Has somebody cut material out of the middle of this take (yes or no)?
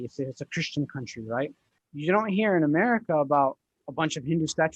yes